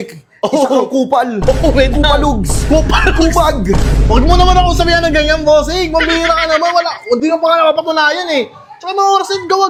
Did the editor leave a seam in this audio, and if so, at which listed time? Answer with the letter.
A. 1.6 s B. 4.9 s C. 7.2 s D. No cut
D